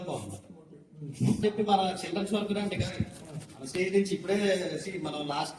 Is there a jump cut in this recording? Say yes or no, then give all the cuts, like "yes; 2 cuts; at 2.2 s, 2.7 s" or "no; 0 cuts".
yes; 1 cut; at 1.4 s